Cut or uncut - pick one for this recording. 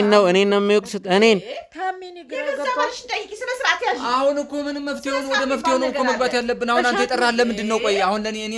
uncut